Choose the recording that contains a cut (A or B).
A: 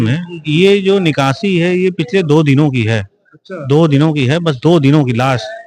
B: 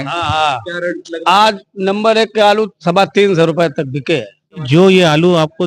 B